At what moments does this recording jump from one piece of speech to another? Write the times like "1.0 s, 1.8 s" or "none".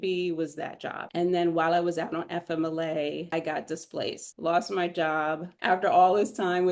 1.1 s, 3.3 s, 4.3 s, 5.5 s